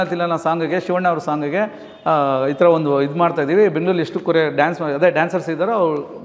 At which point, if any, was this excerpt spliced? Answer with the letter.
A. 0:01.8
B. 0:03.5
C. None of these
C